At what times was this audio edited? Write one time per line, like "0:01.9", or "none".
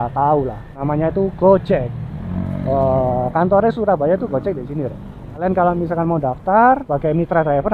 0:00.8
0:05.4
0:06.9